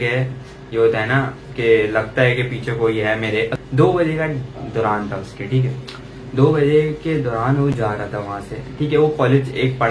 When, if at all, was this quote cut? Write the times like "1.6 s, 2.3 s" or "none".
3.5 s